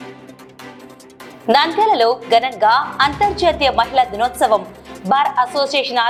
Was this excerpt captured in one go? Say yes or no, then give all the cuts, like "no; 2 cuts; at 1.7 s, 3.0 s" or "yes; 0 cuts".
yes; 0 cuts